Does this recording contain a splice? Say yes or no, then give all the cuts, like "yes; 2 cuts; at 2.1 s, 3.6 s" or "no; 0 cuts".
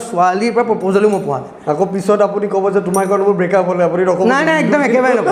no; 0 cuts